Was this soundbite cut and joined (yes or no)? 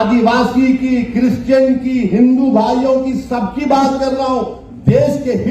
no